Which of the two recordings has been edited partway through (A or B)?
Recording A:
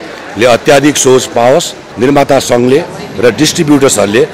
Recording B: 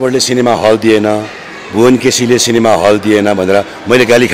A